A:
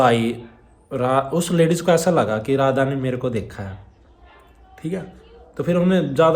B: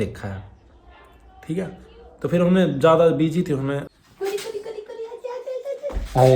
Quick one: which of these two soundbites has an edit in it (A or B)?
B